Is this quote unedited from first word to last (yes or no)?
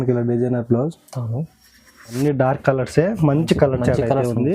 no